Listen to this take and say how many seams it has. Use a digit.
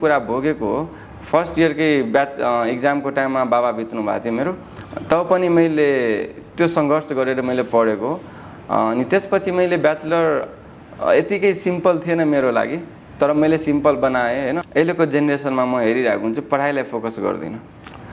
1